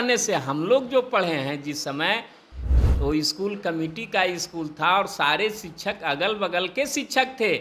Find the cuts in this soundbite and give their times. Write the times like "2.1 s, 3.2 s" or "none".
none